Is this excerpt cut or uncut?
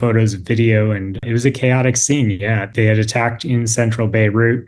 cut